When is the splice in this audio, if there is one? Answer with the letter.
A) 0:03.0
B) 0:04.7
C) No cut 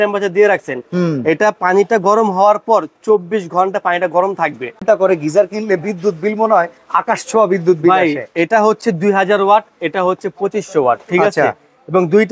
B